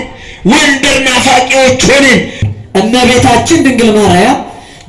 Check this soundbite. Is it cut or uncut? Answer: cut